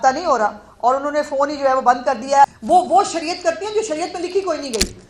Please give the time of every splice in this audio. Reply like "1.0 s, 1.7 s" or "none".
2.6 s